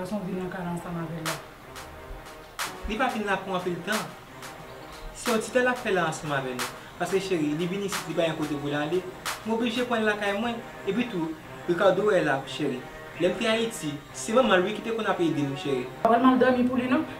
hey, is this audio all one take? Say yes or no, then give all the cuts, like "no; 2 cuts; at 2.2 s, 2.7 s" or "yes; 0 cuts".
no; 2 cuts; at 2.6 s, 16.0 s